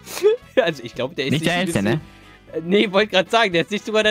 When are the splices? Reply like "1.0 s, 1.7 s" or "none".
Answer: none